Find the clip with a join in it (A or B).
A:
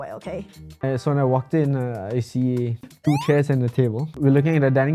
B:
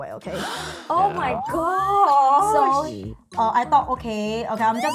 A